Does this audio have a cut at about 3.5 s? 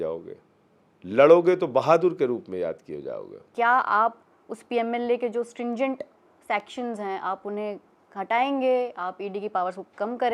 yes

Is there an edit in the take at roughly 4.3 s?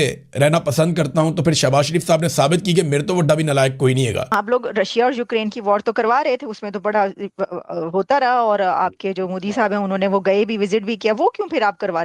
yes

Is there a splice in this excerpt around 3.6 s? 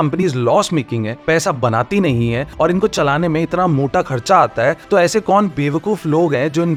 no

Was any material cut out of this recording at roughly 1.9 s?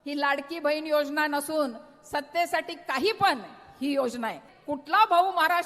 no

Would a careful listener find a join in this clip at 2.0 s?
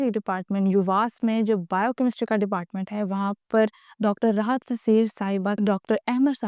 no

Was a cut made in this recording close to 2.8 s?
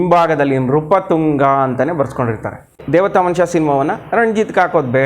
yes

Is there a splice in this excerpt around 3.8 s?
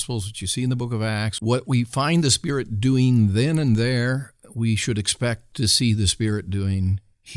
no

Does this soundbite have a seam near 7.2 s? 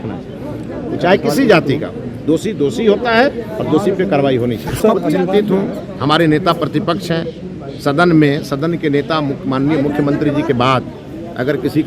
no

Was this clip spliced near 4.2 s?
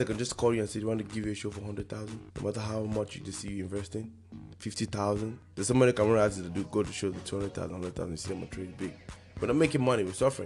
no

